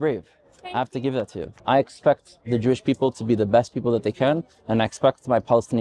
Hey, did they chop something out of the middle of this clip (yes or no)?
yes